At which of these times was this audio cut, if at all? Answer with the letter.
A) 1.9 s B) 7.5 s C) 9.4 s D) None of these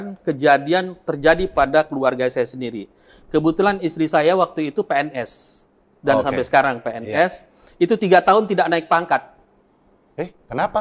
D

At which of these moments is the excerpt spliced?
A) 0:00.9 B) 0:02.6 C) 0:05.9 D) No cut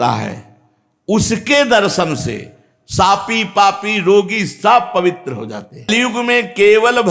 C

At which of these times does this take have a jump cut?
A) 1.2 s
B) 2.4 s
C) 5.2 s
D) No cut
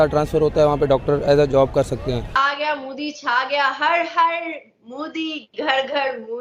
B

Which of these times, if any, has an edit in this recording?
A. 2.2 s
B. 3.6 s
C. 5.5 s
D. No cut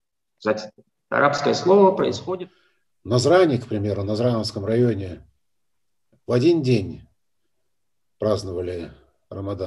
A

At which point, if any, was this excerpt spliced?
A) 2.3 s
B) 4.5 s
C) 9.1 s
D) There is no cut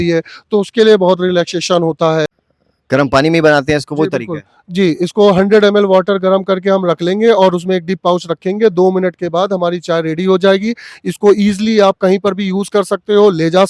A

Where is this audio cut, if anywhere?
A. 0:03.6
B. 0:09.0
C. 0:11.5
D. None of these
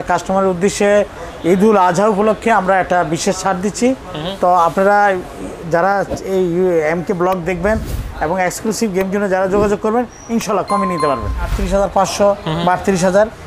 C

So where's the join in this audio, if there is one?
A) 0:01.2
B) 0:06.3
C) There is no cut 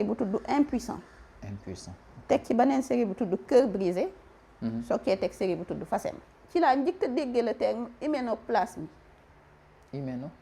B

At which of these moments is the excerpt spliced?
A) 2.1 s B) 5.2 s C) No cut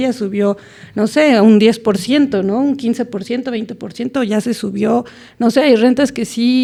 C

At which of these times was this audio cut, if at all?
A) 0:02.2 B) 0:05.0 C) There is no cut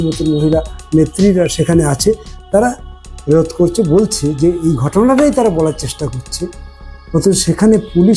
C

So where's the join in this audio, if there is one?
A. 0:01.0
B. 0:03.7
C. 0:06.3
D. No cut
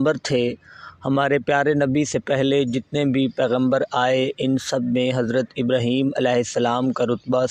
D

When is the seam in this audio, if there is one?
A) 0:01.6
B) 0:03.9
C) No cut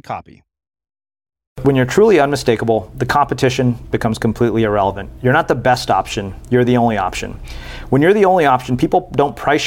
A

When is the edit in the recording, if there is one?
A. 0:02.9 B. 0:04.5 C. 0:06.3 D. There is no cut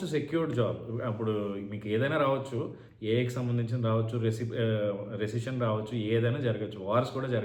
D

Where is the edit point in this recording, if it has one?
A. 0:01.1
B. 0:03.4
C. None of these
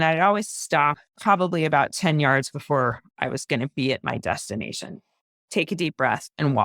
A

